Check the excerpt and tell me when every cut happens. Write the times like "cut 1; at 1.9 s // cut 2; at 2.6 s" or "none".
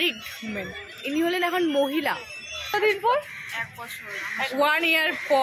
cut 1; at 2.7 s